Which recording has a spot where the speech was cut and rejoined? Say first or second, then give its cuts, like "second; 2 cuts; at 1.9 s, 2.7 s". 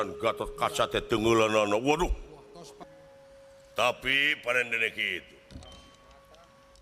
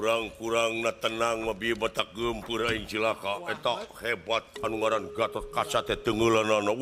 first; 1 cut; at 2.8 s